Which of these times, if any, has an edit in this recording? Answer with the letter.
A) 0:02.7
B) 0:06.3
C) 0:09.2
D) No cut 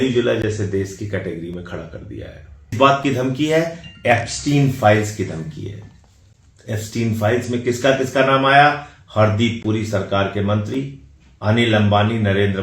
A